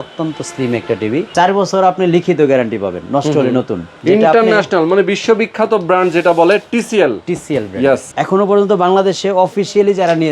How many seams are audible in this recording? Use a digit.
3